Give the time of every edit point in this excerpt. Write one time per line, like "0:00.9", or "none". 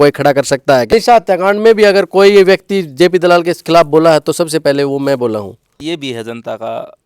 0:00.9
0:05.8